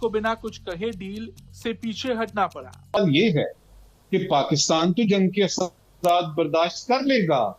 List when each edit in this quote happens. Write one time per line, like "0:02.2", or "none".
0:03.0